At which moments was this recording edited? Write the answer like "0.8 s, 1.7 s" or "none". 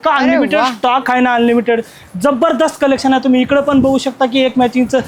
none